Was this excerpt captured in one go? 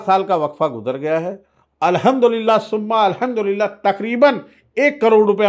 yes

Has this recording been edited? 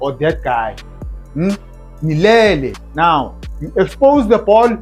yes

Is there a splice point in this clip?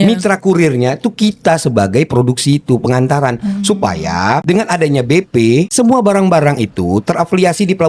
no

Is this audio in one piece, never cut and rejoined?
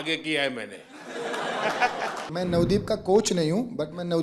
no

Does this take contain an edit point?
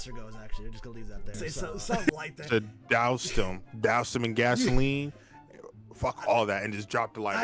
yes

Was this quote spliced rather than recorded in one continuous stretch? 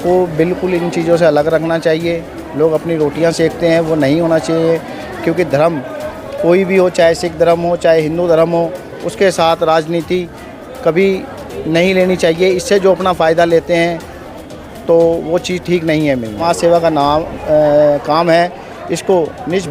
yes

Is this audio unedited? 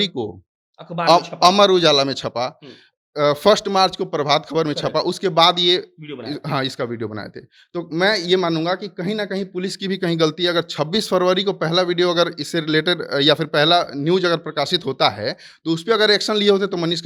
yes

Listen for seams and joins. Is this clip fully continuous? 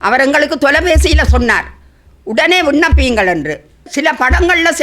no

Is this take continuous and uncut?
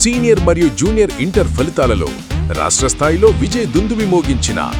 yes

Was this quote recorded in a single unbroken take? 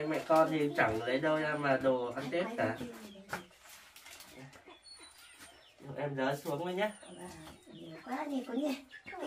yes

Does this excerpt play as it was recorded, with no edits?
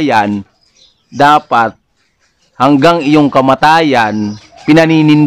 yes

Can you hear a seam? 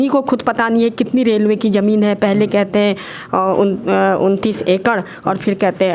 no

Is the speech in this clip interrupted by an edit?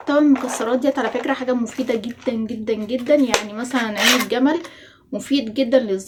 no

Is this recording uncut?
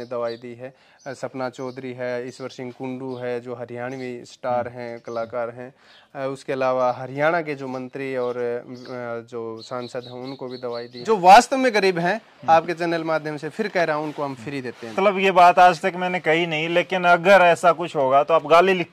no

